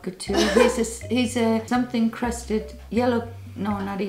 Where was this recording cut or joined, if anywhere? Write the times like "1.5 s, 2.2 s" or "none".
1.7 s